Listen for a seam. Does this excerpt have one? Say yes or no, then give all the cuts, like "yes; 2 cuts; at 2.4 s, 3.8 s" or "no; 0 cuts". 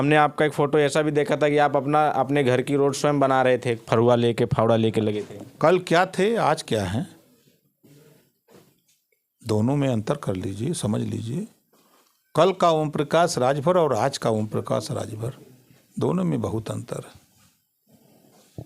no; 0 cuts